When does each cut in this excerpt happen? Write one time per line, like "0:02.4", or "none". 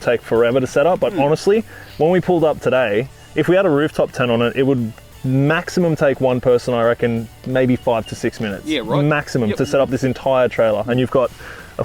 none